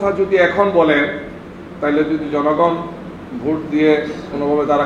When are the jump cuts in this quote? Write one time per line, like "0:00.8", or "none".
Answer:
none